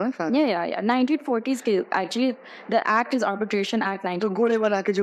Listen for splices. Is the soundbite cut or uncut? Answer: uncut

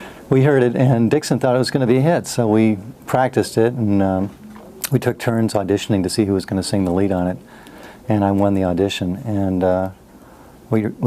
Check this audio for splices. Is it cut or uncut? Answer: cut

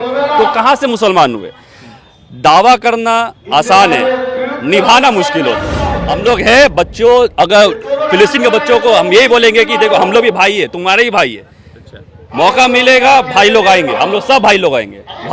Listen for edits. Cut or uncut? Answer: cut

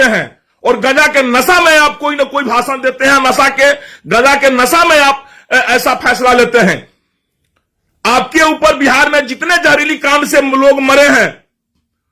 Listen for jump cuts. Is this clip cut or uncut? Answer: uncut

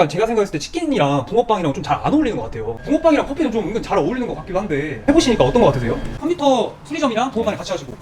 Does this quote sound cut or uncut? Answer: cut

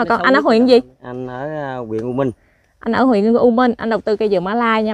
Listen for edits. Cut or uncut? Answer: uncut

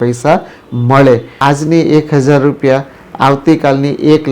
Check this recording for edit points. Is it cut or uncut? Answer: cut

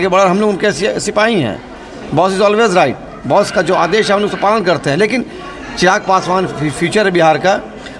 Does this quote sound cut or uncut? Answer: uncut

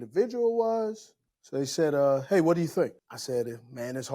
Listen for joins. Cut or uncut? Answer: cut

